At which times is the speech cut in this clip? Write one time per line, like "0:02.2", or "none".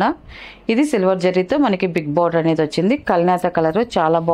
none